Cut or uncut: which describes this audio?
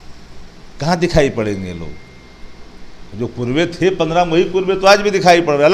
uncut